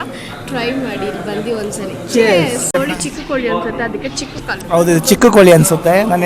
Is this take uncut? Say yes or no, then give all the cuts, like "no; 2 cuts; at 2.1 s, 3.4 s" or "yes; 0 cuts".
no; 1 cut; at 2.7 s